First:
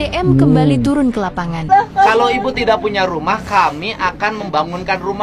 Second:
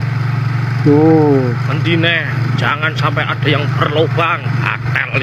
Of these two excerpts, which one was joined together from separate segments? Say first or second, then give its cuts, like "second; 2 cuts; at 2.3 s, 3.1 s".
first; 1 cut; at 1.6 s